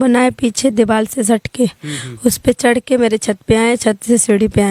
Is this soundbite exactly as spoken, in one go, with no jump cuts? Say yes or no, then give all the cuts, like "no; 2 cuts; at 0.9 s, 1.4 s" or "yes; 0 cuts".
yes; 0 cuts